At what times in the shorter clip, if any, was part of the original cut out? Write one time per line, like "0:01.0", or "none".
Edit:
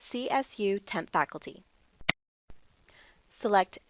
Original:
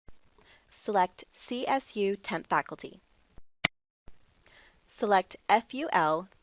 0:02.2